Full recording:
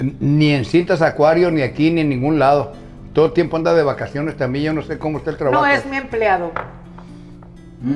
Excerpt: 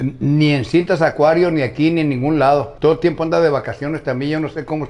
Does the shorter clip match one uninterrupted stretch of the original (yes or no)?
no